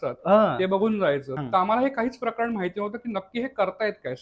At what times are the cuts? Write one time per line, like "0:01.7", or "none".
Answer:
0:01.3